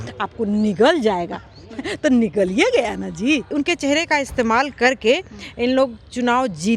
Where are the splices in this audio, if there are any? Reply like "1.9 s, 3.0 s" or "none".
3.5 s